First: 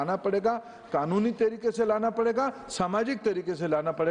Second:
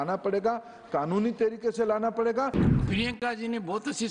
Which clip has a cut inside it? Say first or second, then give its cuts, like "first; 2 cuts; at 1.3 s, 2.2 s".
second; 1 cut; at 2.6 s